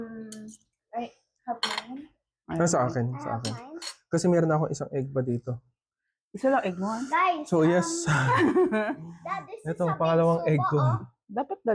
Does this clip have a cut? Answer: no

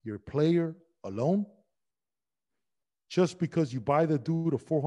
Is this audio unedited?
yes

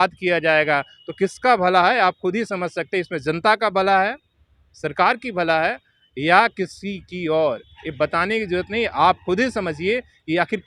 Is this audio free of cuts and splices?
yes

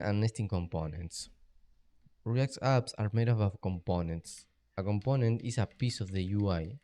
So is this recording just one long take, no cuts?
no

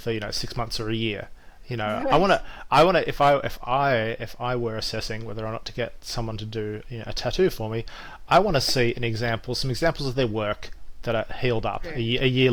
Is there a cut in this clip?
no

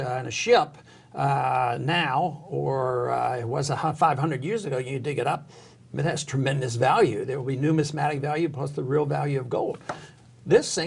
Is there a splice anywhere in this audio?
no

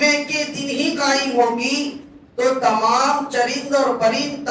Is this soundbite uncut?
yes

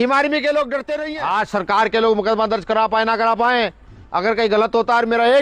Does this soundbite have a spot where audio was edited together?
yes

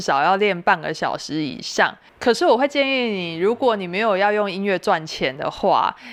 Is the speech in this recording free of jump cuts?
yes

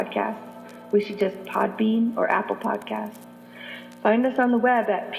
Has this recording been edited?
no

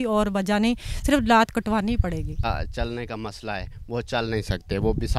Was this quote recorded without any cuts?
no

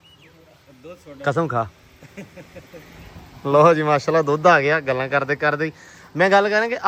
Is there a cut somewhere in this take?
no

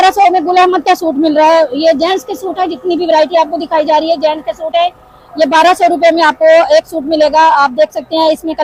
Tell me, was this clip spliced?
no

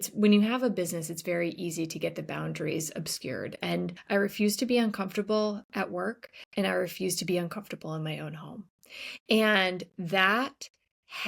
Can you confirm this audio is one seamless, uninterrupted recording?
no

